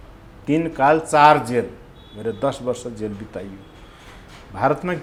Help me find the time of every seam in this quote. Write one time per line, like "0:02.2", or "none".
none